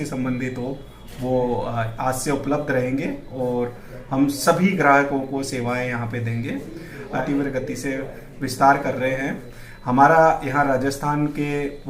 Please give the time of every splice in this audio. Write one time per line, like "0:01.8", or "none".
0:07.2